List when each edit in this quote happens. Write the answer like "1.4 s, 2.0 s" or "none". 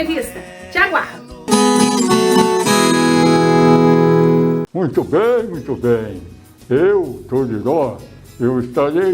4.7 s